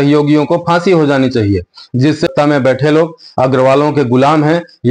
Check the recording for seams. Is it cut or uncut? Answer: cut